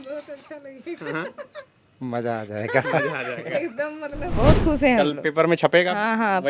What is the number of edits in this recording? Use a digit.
1